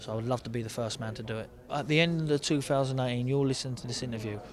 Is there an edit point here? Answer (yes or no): yes